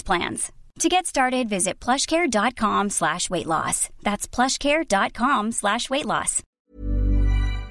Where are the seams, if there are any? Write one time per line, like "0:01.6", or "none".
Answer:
0:06.4